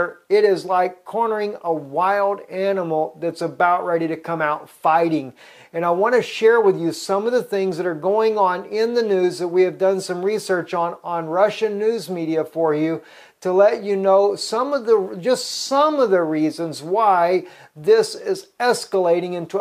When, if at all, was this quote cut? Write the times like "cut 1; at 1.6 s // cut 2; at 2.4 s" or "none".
cut 1; at 10.2 s